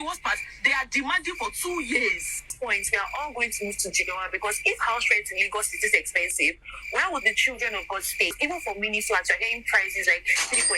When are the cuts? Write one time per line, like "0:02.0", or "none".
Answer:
0:02.5
0:08.3